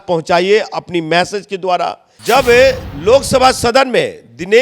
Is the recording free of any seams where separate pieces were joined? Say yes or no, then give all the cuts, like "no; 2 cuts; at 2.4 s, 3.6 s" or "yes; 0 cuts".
no; 1 cut; at 2.1 s